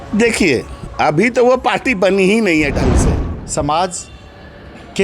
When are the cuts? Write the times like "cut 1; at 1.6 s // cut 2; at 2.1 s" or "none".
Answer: cut 1; at 3.2 s